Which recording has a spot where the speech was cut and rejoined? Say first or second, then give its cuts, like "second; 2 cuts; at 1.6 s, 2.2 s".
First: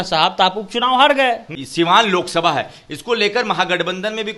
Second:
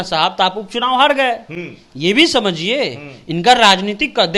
first; 1 cut; at 1.6 s